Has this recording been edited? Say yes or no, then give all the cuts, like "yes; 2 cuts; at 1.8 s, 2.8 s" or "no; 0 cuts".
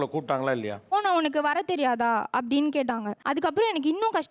yes; 2 cuts; at 0.9 s, 3.1 s